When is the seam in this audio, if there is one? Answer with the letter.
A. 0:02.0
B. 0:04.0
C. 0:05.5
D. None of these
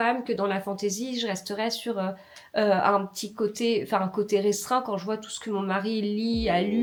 D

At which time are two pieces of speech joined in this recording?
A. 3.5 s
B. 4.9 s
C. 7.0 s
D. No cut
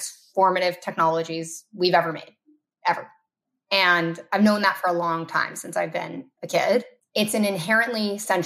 C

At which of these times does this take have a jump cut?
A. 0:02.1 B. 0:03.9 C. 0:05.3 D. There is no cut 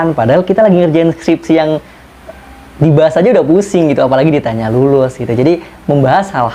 D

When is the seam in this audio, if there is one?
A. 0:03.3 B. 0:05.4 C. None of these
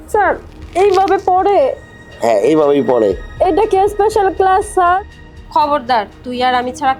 B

